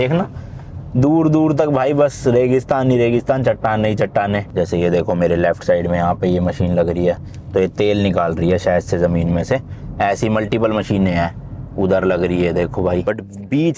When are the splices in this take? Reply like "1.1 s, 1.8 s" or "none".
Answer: 4.5 s, 13.0 s